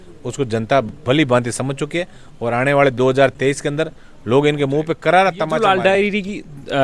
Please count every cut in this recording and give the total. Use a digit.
1